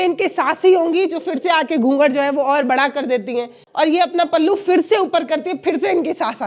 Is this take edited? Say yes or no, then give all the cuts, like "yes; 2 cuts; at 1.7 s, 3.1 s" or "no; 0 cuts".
yes; 1 cut; at 3.6 s